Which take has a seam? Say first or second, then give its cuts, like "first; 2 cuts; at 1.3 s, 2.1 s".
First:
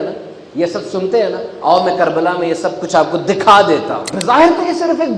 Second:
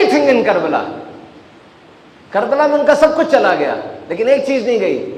first; 1 cut; at 4.1 s